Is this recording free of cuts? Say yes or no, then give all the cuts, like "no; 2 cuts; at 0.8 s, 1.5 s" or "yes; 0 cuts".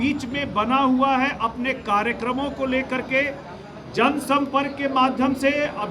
yes; 0 cuts